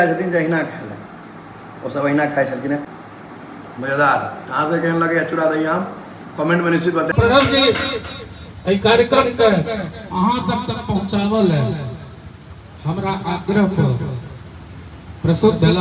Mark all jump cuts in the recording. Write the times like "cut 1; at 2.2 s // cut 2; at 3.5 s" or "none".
cut 1; at 3.0 s // cut 2; at 7.1 s